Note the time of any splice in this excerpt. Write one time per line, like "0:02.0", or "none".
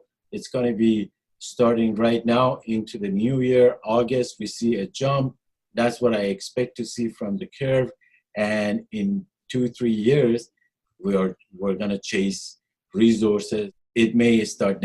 0:13.8